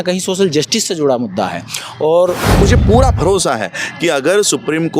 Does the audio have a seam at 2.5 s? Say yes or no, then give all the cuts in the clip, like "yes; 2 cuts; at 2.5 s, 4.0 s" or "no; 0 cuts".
yes; 1 cut; at 2.5 s